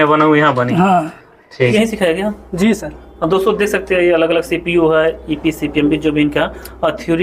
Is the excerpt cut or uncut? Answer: cut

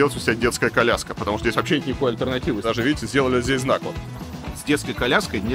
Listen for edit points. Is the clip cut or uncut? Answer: cut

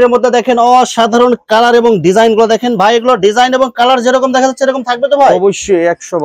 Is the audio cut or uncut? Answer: uncut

